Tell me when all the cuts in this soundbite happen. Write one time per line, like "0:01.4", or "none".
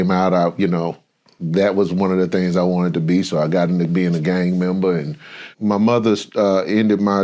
0:05.4